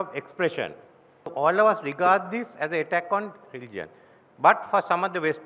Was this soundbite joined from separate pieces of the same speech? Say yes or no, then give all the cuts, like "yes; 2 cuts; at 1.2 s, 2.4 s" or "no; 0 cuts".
yes; 1 cut; at 1.3 s